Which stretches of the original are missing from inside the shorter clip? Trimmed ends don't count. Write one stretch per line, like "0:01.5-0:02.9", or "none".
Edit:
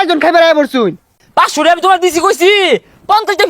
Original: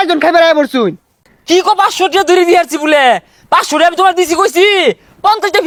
0:01.2-0:03.3